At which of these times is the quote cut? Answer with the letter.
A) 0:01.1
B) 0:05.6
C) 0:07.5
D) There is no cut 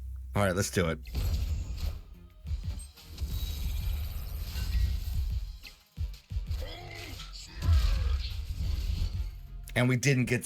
A